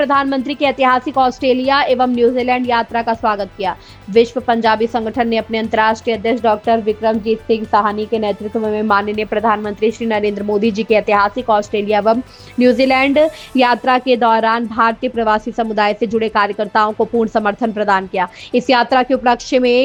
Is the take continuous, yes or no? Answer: yes